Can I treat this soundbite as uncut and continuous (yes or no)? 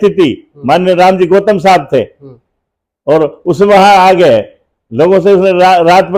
yes